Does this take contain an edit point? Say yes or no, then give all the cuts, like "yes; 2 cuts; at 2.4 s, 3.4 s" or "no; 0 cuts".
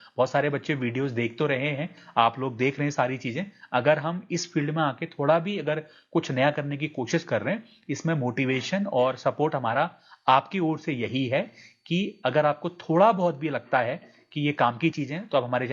no; 0 cuts